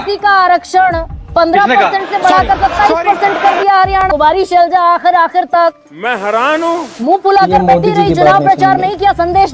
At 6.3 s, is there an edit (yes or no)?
no